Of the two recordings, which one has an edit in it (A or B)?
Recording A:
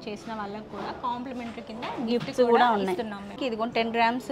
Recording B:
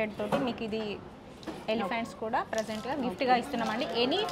A